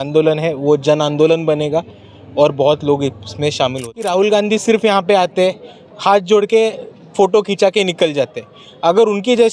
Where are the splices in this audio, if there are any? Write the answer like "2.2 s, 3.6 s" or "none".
4.0 s